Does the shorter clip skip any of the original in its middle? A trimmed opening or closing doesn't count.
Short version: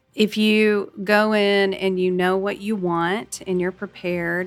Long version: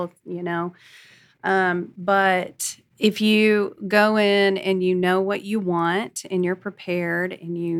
no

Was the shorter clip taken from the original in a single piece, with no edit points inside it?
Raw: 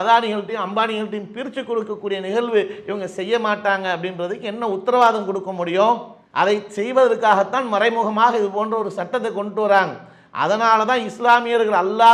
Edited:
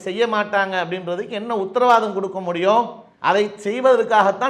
yes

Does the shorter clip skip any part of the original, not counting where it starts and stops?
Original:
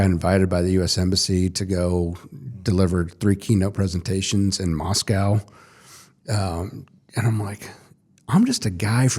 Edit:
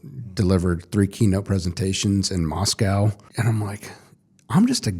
yes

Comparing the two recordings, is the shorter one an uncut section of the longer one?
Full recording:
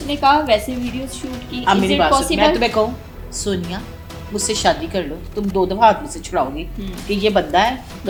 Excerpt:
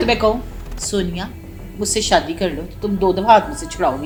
yes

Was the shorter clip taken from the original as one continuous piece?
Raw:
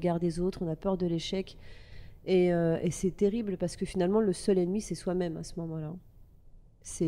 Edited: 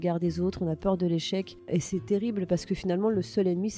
no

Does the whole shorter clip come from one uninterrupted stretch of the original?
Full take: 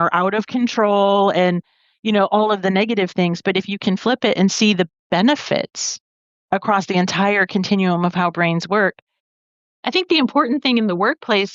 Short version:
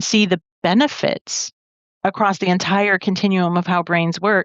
yes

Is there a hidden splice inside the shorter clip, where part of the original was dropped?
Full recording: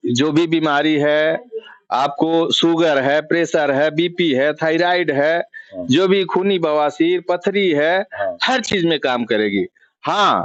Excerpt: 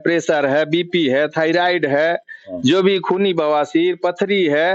no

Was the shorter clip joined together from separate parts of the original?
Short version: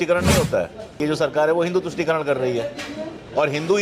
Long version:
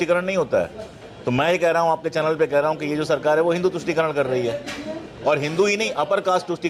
yes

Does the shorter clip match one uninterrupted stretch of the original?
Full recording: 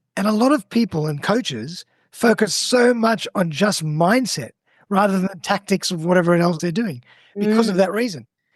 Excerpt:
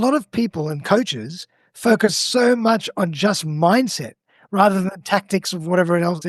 yes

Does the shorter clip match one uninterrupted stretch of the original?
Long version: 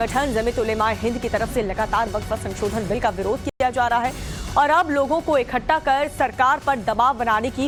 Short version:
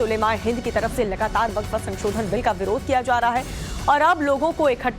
no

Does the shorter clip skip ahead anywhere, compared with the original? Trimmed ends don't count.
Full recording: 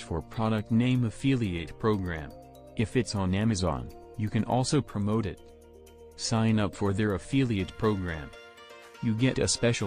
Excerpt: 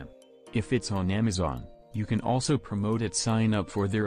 yes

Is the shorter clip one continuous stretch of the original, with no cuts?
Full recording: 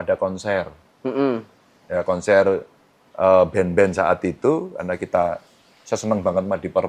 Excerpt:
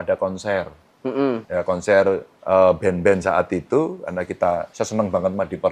no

